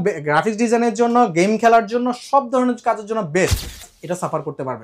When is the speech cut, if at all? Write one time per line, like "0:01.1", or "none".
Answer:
0:03.9